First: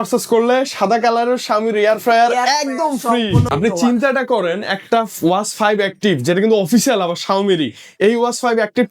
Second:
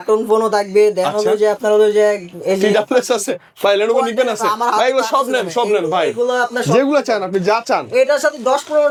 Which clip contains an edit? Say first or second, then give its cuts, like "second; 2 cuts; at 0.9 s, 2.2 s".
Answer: first; 1 cut; at 3.5 s